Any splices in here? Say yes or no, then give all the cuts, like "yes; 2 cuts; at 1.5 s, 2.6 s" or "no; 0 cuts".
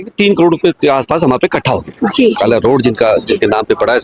yes; 1 cut; at 2.4 s